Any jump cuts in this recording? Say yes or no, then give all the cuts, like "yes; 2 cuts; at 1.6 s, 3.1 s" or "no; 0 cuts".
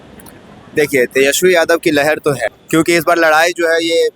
yes; 1 cut; at 2.5 s